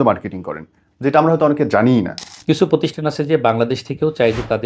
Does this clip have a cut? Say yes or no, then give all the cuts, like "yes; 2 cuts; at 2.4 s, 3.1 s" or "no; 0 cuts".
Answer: yes; 1 cut; at 2.2 s